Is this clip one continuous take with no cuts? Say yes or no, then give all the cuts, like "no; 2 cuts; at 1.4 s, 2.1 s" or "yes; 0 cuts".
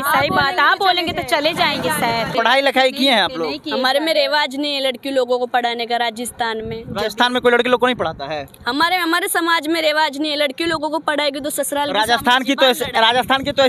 no; 1 cut; at 2.3 s